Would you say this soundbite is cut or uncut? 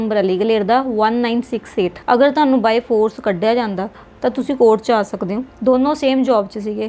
cut